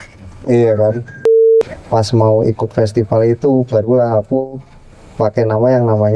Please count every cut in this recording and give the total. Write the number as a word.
one